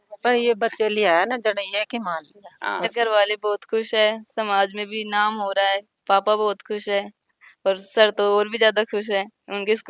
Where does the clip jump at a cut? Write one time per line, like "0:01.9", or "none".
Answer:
0:02.9